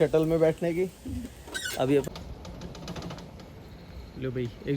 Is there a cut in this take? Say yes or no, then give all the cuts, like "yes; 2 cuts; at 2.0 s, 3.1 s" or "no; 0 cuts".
yes; 1 cut; at 2.0 s